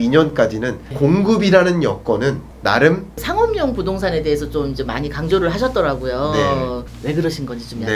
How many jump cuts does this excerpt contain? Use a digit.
3